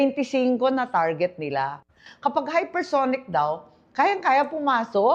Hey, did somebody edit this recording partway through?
no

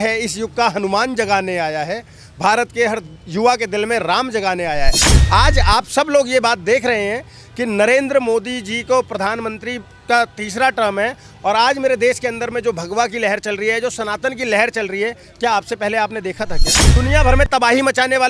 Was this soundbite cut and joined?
yes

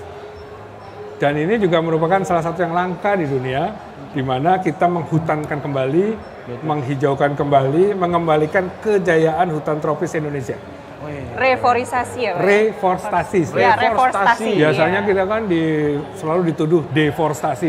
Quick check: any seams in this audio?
no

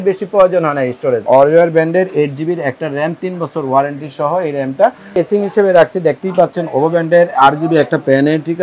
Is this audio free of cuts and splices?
no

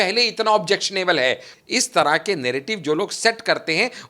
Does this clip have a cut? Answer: yes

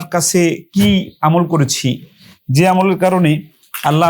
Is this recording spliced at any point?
no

